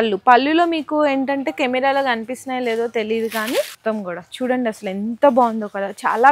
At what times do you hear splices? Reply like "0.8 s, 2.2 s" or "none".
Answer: 3.7 s

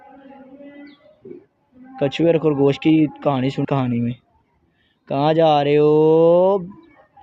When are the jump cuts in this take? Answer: 3.6 s

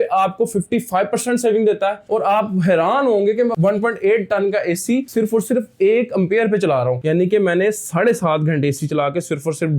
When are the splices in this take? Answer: 2.0 s, 7.0 s

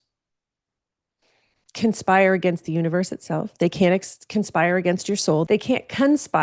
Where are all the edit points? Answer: 5.4 s

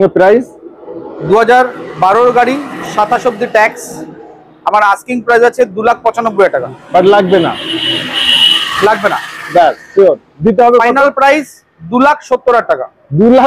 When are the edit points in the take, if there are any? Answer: none

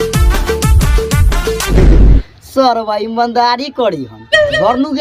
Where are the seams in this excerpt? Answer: 1.7 s

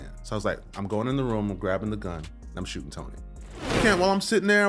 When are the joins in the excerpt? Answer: 3.8 s

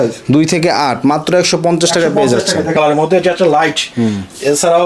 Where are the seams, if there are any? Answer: 2.7 s

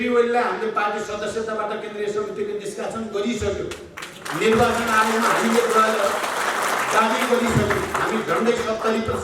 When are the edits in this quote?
none

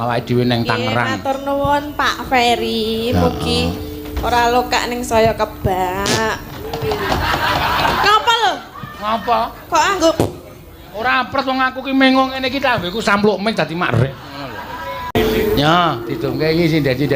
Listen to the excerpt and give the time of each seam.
15.1 s

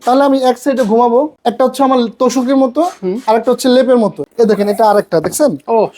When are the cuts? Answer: 1.3 s, 4.2 s

